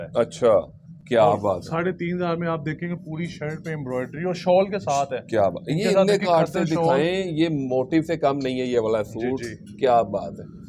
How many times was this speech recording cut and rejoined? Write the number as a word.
zero